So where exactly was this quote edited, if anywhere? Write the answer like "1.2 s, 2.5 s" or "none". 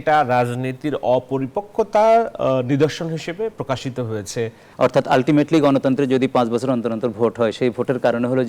4.6 s